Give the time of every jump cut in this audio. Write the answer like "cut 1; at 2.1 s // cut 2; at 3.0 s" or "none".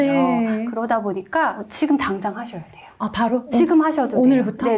none